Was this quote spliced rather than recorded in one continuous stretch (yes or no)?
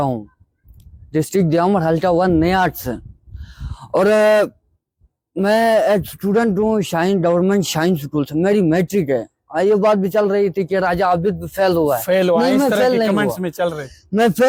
no